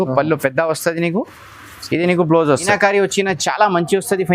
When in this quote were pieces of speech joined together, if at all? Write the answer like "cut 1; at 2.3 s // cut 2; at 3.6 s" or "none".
cut 1; at 2.7 s